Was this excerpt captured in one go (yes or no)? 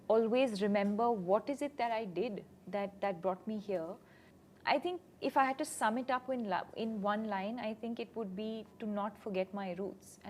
yes